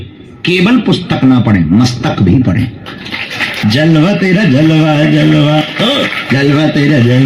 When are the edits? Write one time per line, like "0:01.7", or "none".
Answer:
0:03.5